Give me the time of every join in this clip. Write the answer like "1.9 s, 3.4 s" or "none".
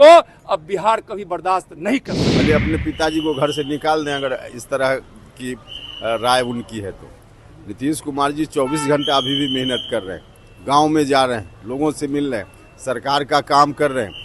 2.2 s